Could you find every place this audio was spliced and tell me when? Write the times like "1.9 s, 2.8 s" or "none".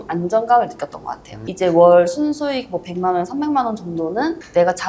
1.4 s